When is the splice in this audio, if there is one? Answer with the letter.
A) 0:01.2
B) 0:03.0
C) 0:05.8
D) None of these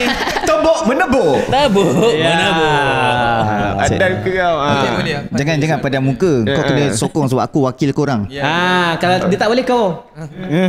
D